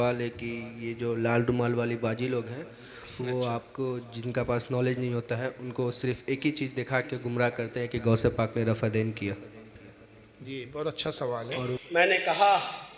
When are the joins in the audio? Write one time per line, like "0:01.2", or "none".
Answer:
0:11.8